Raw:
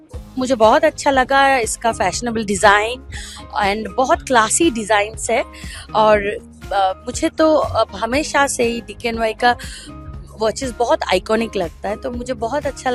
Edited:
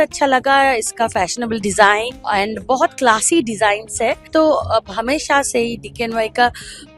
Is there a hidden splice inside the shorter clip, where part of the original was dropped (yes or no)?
yes